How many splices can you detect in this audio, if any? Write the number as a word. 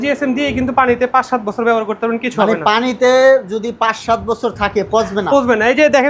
zero